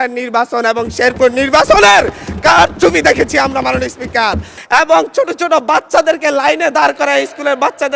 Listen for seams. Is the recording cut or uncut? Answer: cut